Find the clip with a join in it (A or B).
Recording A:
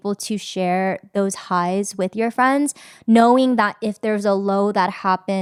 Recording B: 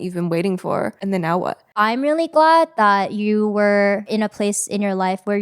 B